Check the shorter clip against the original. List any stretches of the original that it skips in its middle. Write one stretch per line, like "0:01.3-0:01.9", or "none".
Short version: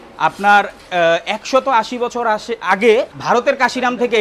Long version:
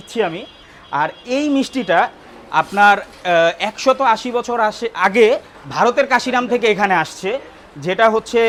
0:05.5-0:05.7